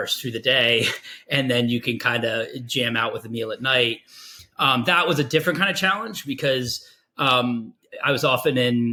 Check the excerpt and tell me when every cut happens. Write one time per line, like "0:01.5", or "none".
none